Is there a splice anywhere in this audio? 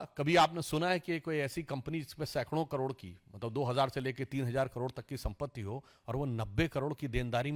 no; 0 cuts

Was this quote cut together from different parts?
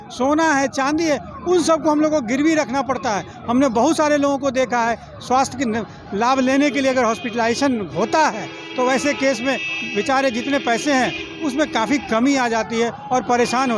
no; 0 cuts

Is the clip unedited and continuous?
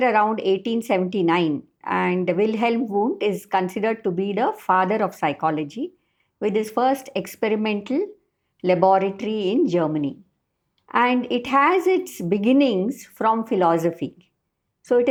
yes; 0 cuts

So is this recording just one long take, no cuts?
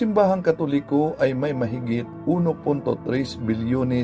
no; 1 cut; at 1.2 s

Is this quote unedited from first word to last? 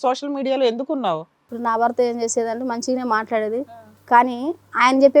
no; 2 cuts; at 1.5 s, 3.7 s

